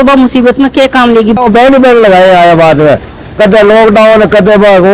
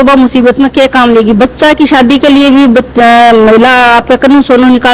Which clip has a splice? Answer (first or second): first